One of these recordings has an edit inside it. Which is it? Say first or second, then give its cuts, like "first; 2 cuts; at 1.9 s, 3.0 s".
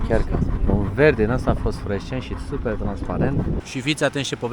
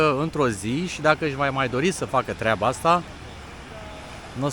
first; 1 cut; at 3.6 s